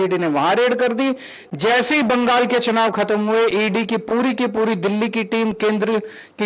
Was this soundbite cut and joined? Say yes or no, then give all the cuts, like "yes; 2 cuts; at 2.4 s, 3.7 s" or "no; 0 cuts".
no; 0 cuts